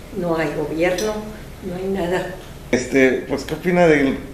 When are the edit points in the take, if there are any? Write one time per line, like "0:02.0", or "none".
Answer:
0:02.7